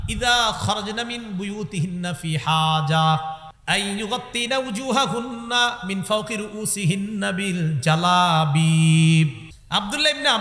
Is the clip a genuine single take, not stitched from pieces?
no; 2 cuts; at 3.5 s, 9.5 s

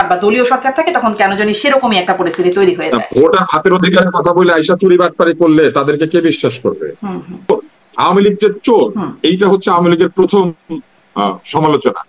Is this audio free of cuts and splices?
no; 1 cut; at 7.5 s

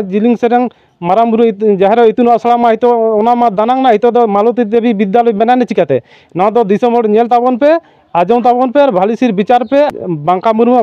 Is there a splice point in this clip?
yes; 1 cut; at 9.9 s

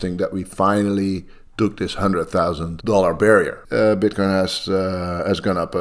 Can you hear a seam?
yes; 2 cuts; at 2.7 s, 3.6 s

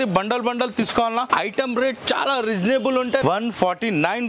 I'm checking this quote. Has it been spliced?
yes; 1 cut; at 3.2 s

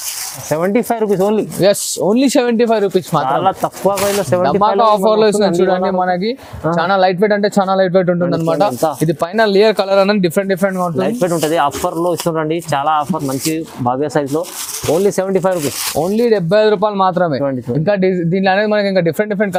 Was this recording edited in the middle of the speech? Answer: no; 0 cuts

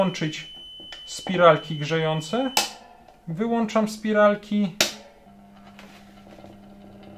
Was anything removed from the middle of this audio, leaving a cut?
yes; 1 cut; at 5.2 s

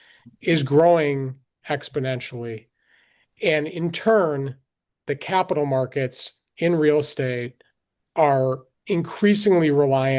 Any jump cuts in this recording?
no; 0 cuts

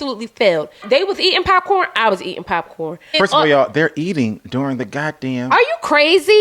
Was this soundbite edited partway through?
yes; 2 cuts; at 0.8 s, 3.1 s

